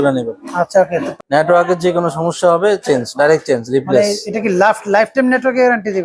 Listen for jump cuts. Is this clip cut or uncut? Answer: cut